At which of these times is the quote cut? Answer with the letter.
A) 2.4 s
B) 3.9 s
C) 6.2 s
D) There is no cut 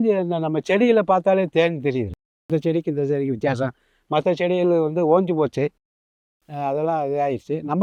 D